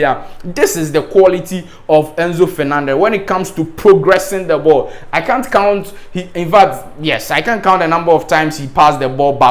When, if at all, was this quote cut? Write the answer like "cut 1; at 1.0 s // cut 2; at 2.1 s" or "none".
none